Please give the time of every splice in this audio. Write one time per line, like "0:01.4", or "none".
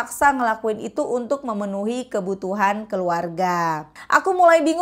0:03.9